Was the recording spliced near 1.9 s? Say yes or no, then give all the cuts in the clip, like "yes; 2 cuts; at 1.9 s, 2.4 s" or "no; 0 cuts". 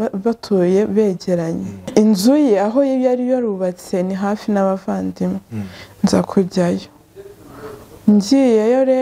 yes; 1 cut; at 1.9 s